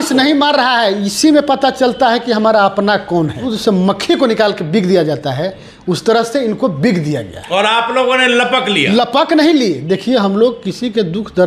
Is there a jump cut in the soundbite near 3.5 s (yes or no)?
yes